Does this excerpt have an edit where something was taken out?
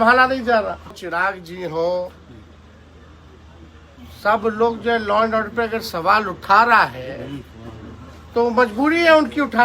yes; 1 cut; at 1.0 s

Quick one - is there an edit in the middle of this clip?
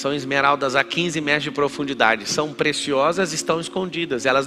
no; 0 cuts

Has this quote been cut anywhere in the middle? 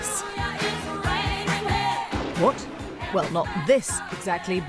yes; 1 cut; at 3.0 s

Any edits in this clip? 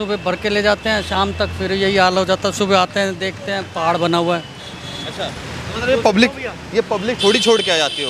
no; 0 cuts

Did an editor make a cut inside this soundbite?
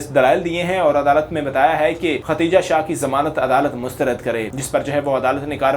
yes; 2 cuts; at 2.2 s, 4.6 s

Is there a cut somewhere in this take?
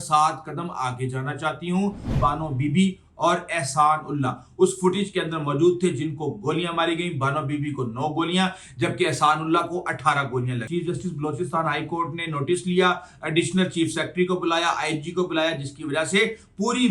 yes; 2 cuts; at 2.2 s, 10.6 s

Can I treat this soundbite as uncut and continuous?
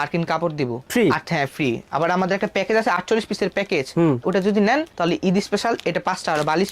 yes; 0 cuts

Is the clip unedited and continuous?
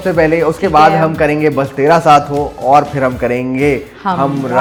yes; 0 cuts

